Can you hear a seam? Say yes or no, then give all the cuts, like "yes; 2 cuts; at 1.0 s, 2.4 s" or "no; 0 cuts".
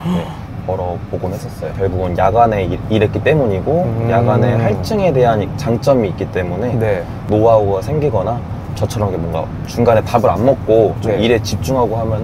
no; 0 cuts